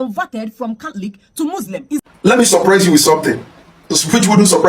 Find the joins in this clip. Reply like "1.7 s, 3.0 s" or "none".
2.1 s